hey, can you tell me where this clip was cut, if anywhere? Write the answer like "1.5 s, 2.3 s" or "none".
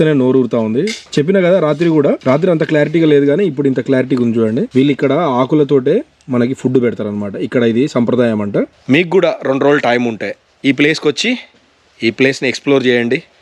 1.0 s, 2.2 s, 4.7 s, 8.8 s